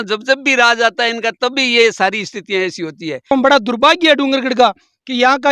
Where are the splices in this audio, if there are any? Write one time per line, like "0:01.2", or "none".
0:03.3